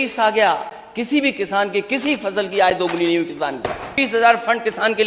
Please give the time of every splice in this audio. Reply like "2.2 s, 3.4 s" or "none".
3.9 s